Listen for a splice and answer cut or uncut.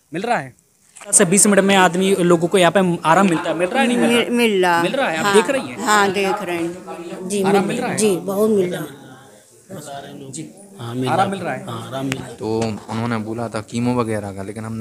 cut